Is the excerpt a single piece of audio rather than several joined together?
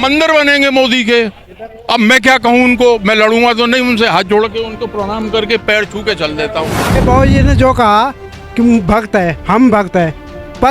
no; 1 cut; at 7.0 s

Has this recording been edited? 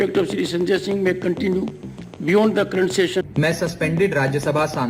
yes; 1 cut; at 3.3 s

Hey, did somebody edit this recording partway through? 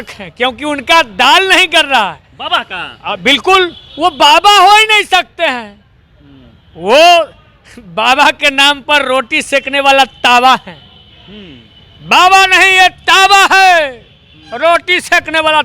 no; 0 cuts

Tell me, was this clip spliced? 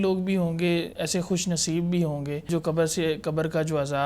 yes; 2 cuts; at 1.0 s, 2.5 s

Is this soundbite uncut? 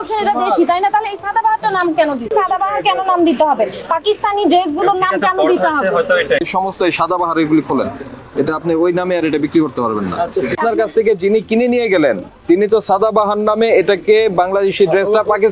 no; 3 cuts; at 2.3 s, 6.4 s, 10.6 s

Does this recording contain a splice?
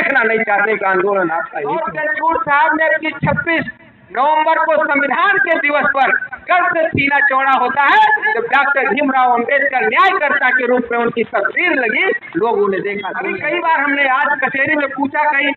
yes; 2 cuts; at 1.9 s, 13.1 s

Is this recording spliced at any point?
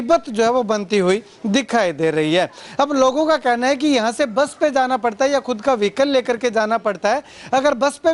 no; 0 cuts

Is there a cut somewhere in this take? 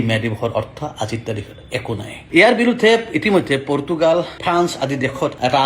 yes; 1 cut; at 2.1 s

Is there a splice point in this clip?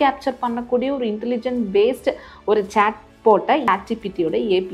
yes; 1 cut; at 3.7 s

